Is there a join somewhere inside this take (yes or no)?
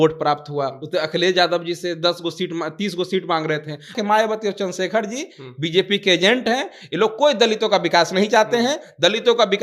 yes